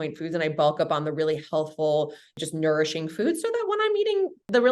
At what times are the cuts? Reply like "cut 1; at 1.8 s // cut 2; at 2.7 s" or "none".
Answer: cut 1; at 2.4 s

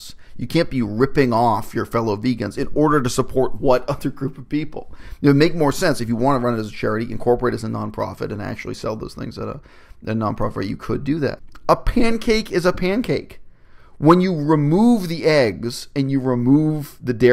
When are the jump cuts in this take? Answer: cut 1; at 11.5 s

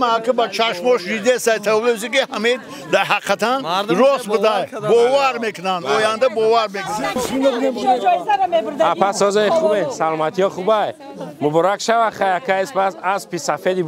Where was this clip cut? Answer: cut 1; at 7.1 s

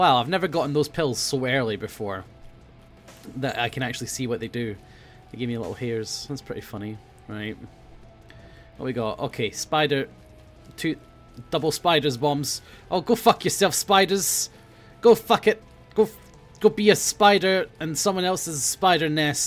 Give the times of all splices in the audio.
cut 1; at 18.1 s

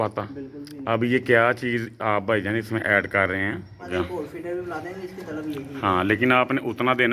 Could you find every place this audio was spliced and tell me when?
cut 1; at 3.9 s

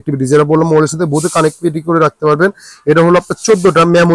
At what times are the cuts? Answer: none

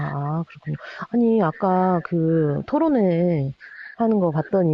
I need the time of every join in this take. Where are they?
none

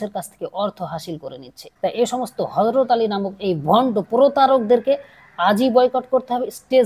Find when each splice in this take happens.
cut 1; at 1.6 s

